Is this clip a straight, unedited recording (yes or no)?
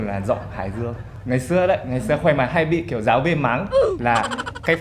yes